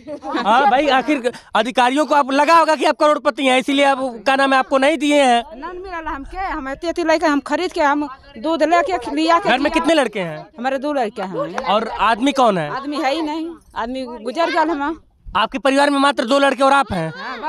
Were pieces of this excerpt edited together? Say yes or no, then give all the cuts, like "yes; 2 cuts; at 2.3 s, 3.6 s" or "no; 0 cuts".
no; 0 cuts